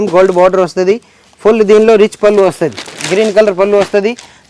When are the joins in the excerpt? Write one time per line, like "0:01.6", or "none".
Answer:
none